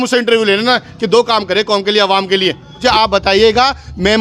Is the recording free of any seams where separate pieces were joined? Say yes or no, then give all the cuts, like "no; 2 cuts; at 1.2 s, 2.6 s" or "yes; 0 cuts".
no; 1 cut; at 2.8 s